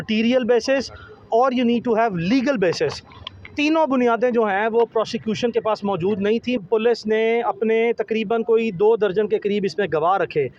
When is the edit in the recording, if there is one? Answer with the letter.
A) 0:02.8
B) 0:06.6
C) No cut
B